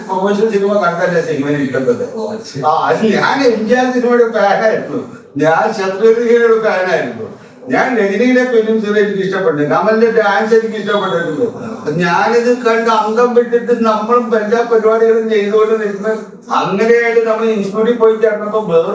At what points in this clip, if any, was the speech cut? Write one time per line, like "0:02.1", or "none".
none